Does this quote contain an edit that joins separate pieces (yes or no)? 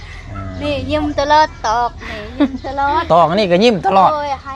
no